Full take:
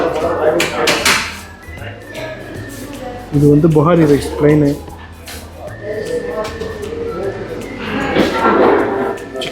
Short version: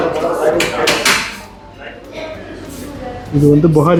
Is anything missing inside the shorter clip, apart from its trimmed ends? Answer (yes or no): no